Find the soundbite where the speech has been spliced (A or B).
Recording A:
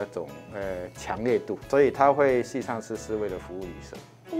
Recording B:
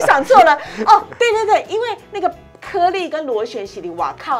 A